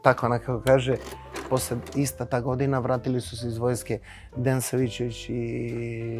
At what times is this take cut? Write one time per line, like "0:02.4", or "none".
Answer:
0:01.4